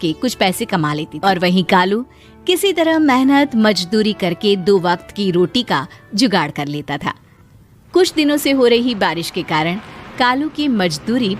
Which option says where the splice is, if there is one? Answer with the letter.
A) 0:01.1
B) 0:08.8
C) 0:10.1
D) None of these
A